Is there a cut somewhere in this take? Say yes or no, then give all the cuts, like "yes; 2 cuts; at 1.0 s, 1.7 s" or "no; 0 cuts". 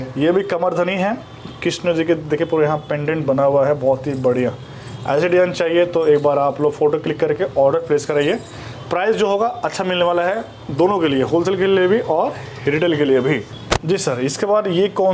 no; 0 cuts